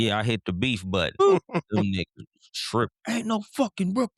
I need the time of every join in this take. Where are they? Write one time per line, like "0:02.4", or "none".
0:01.2

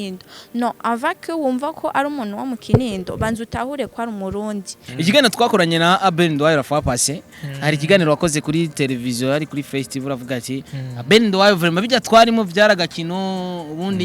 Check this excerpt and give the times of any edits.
0:04.8

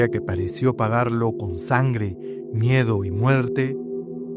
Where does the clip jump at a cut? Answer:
none

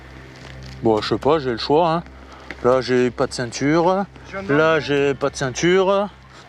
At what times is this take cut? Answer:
none

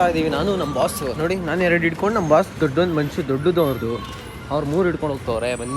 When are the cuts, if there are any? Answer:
none

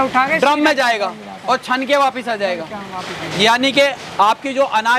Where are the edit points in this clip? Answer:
none

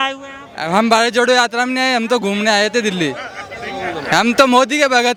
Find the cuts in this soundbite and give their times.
none

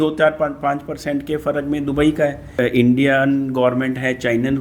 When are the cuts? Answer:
0:02.5

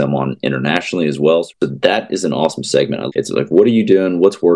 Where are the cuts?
0:01.5
0:03.1

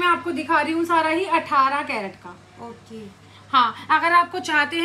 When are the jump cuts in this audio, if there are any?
none

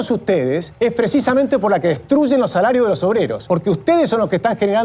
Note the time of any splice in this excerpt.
0:03.4

